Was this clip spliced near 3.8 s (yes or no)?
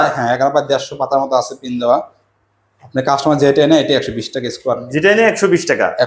no